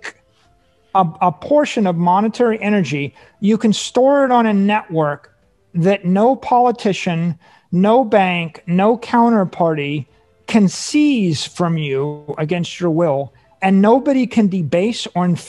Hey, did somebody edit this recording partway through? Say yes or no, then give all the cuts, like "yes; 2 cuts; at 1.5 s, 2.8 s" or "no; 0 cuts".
no; 0 cuts